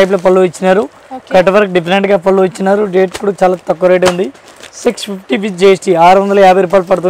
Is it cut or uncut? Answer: uncut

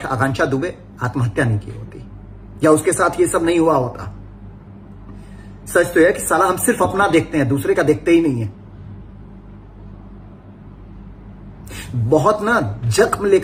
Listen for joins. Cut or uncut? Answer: uncut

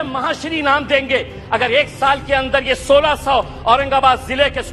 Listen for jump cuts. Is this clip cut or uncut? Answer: uncut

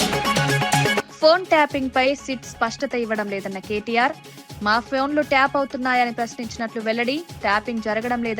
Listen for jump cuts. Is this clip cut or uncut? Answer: cut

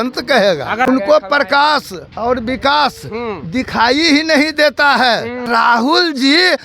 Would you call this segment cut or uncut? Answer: cut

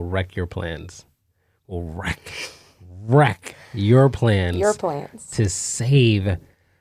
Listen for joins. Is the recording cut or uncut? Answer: uncut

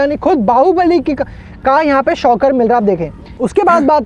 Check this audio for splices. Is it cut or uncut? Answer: uncut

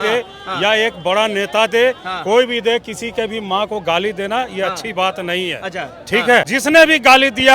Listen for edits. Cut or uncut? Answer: cut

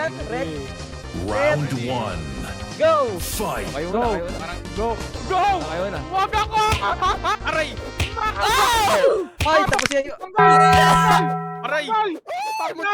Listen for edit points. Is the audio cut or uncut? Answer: uncut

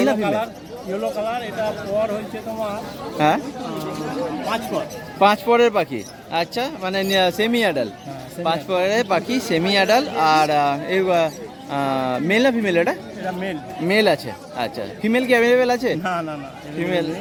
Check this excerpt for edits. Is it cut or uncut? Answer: uncut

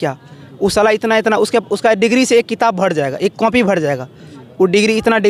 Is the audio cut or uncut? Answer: uncut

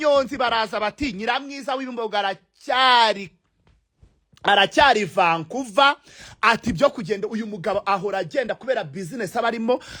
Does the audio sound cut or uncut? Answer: uncut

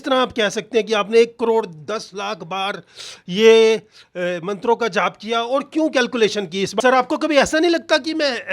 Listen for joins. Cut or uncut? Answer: cut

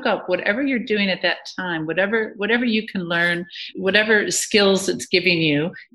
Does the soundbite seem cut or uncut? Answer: uncut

